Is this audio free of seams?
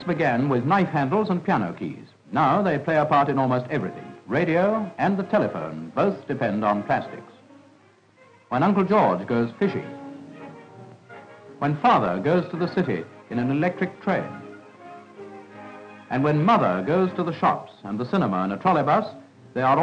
yes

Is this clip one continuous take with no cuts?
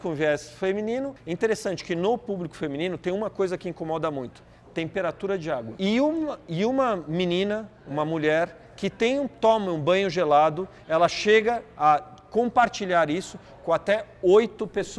no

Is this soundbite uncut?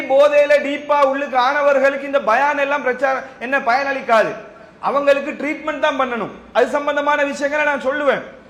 yes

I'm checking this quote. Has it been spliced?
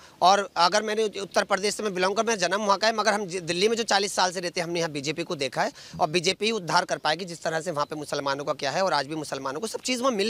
no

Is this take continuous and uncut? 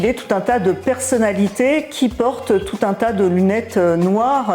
yes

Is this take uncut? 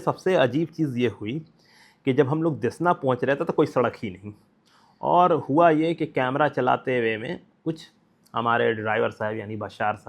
no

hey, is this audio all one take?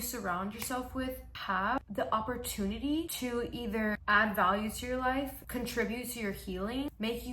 no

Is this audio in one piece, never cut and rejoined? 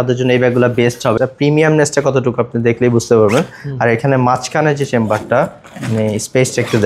no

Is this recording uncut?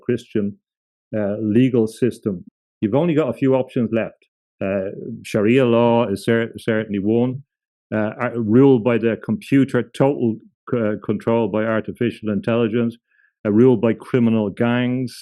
no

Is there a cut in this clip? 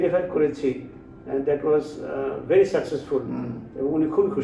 no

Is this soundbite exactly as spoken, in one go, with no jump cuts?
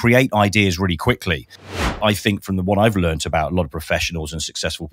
no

